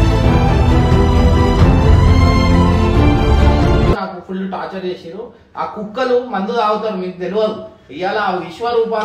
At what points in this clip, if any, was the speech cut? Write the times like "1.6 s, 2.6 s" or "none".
3.9 s